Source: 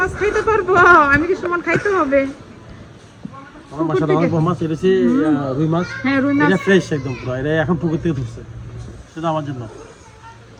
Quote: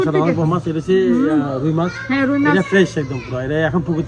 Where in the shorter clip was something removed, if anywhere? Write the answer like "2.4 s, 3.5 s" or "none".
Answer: none